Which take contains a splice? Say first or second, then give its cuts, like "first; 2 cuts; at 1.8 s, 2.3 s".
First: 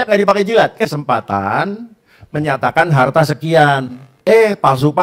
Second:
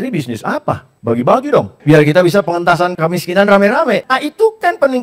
second; 4 cuts; at 0.9 s, 1.7 s, 3.0 s, 4.0 s